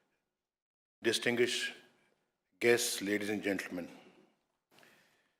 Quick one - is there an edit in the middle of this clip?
no; 0 cuts

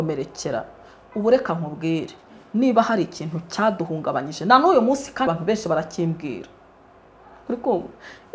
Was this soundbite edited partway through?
yes; 1 cut; at 5.3 s

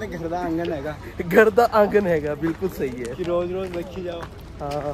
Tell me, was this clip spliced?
no; 0 cuts

